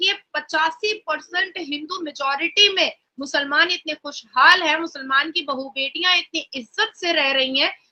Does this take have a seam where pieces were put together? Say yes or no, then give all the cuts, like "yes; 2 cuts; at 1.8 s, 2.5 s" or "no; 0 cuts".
no; 0 cuts